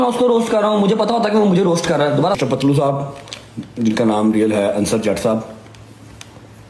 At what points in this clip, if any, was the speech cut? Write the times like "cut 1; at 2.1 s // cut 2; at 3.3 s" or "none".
cut 1; at 2.4 s